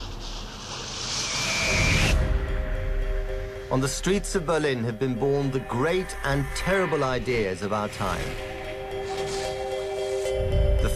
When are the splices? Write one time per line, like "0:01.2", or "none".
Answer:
none